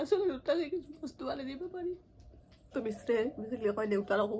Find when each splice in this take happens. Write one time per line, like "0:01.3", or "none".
0:02.7